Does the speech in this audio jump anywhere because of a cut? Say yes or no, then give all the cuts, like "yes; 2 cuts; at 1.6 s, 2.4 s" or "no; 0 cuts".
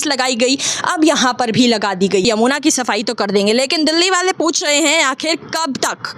yes; 1 cut; at 2.2 s